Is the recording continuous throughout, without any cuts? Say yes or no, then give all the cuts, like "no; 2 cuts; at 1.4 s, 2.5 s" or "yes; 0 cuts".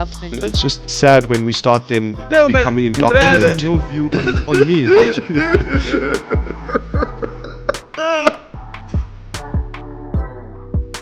no; 1 cut; at 8.5 s